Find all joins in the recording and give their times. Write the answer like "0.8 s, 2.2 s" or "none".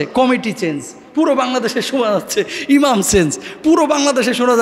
none